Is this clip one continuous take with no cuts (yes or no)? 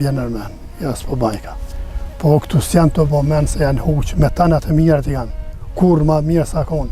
yes